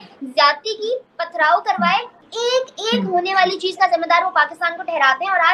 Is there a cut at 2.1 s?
yes; 1 cut; at 2.1 s

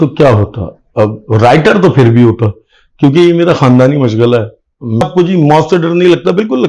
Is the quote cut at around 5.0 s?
yes; 1 cut; at 5.0 s

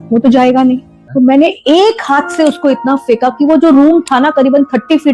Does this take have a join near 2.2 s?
no; 1 cut; at 0.9 s

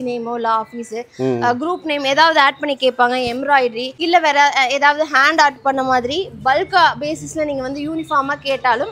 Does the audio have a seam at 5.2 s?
no; 1 cut; at 3.9 s

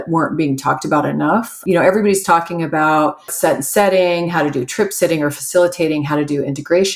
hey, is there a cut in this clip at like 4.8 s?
no; 2 cuts; at 1.6 s, 3.3 s

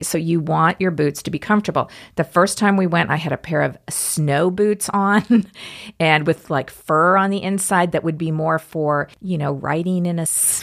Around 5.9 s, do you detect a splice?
no; 0 cuts

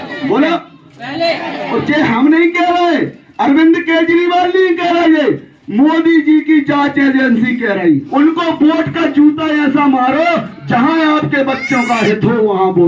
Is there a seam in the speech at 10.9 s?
no; 1 cut; at 8.1 s

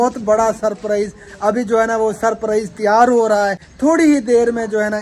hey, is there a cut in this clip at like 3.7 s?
no; 0 cuts

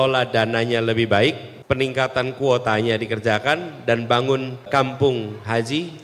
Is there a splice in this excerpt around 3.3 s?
no; 2 cuts; at 1.5 s, 4.7 s

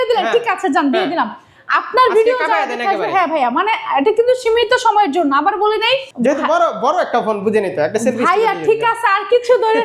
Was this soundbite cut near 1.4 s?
no; 1 cut; at 6.1 s

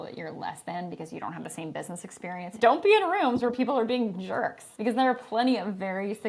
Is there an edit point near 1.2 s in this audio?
no; 2 cuts; at 2.5 s, 4.6 s

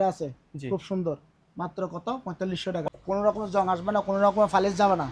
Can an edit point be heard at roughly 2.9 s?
yes; 1 cut; at 2.9 s

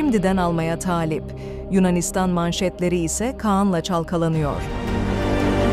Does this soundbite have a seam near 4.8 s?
yes; 1 cut; at 4.8 s

